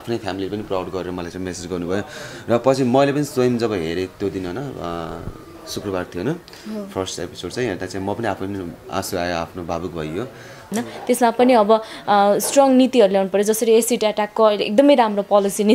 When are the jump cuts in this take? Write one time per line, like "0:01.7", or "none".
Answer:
0:10.7